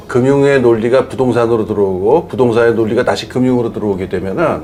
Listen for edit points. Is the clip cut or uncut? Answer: uncut